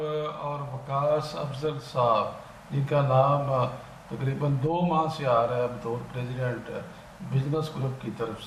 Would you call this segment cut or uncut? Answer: uncut